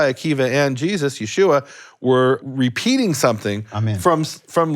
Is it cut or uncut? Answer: cut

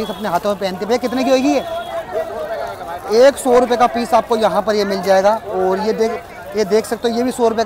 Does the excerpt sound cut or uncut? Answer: uncut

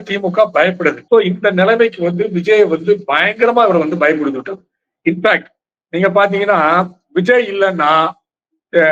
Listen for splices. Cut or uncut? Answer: cut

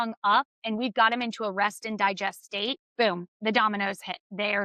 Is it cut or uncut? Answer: cut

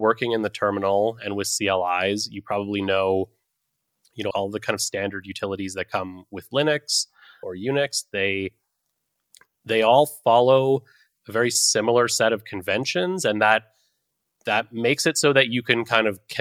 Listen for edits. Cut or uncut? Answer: cut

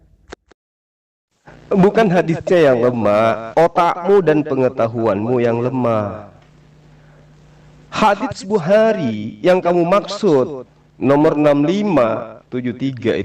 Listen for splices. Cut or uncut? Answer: uncut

